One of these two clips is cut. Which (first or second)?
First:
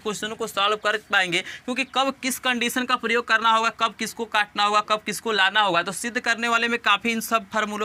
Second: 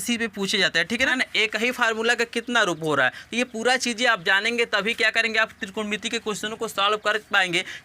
second